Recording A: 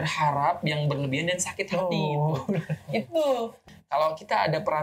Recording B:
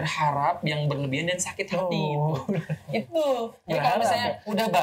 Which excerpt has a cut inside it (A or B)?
A